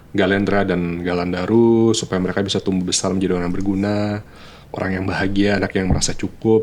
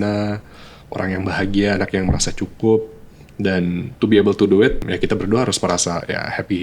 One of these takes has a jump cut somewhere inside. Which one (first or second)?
second